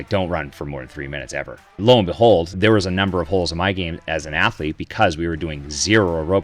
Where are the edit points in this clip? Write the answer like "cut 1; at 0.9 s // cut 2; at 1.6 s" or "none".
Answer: cut 1; at 1.8 s // cut 2; at 2.5 s